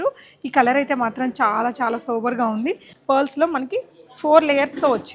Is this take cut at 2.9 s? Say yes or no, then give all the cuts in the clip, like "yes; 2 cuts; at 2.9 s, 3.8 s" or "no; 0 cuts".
yes; 1 cut; at 2.9 s